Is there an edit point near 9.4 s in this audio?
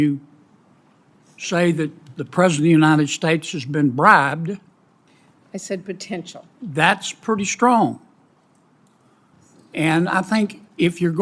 yes; 1 cut; at 9.4 s

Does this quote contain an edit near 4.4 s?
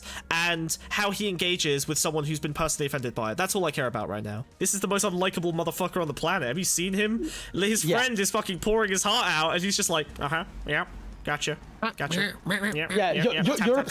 yes; 1 cut; at 4.4 s

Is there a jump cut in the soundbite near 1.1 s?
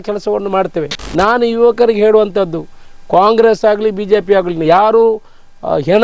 yes; 1 cut; at 1.1 s

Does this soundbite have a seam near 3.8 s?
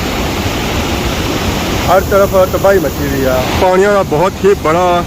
no; 1 cut; at 1.8 s

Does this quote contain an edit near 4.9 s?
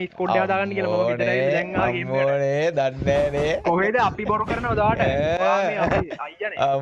no; 0 cuts

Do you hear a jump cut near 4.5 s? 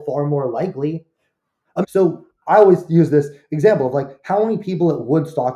no; 1 cut; at 1.8 s

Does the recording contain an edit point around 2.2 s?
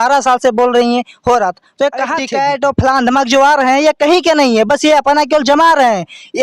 yes; 1 cut; at 2.2 s

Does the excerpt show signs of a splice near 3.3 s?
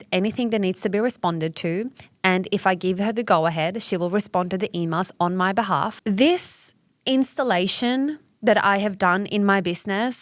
no; 1 cut; at 6.0 s

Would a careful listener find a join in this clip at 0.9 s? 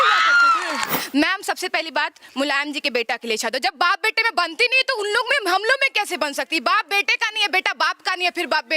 yes; 1 cut; at 0.9 s

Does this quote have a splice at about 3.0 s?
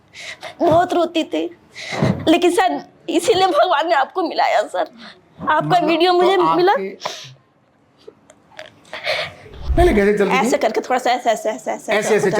no; 1 cut; at 9.5 s

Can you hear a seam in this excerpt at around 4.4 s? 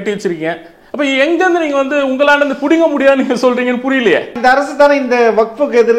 yes; 1 cut; at 4.4 s

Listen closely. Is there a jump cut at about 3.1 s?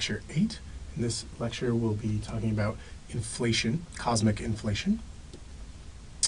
no; 1 cut; at 4.9 s

